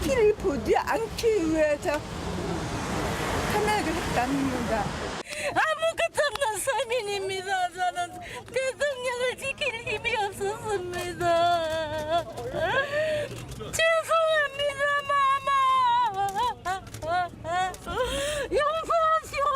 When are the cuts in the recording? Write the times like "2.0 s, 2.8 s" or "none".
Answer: 2.8 s